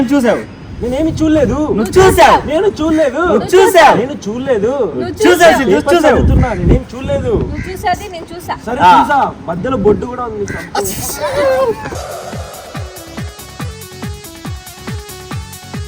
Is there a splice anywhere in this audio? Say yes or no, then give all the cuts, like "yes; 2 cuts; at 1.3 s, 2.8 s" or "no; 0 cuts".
no; 0 cuts